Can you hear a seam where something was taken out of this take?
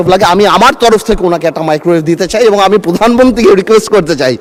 no; 0 cuts

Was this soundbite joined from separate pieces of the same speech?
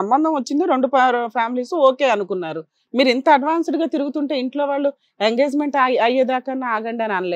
no; 0 cuts

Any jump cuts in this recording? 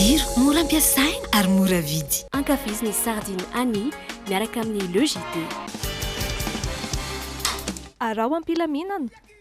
no; 0 cuts

